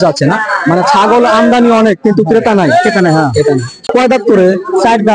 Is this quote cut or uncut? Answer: cut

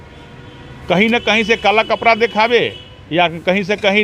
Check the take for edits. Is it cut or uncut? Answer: uncut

